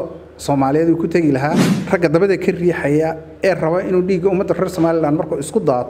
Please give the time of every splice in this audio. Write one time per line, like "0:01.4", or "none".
0:01.7